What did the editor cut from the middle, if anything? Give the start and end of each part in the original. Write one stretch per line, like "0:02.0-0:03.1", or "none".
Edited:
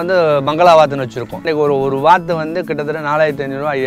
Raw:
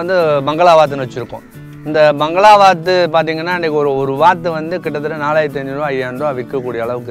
0:01.4-0:03.5